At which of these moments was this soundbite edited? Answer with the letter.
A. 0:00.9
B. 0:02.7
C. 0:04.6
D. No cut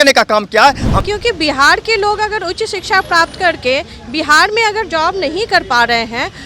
A